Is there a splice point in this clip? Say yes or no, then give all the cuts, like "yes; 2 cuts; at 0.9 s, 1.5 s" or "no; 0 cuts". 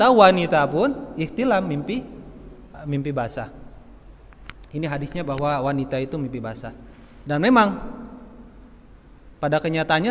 yes; 1 cut; at 2.7 s